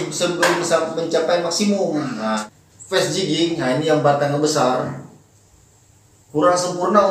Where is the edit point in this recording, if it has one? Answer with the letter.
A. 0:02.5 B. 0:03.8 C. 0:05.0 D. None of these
A